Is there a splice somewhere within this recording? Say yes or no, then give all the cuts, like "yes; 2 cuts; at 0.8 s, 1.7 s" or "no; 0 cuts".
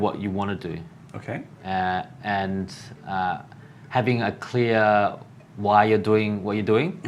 no; 0 cuts